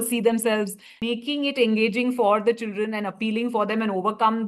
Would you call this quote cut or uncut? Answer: cut